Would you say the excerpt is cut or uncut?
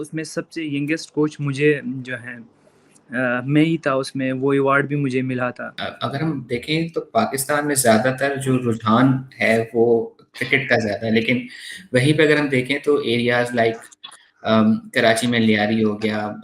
cut